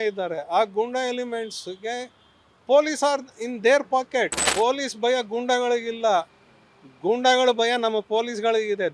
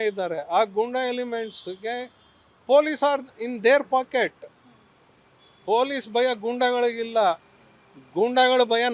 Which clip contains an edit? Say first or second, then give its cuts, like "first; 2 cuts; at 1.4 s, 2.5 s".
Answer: first; 1 cut; at 4.4 s